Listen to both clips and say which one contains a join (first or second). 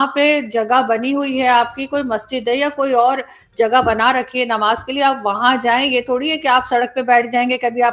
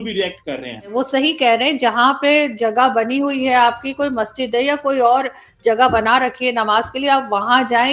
second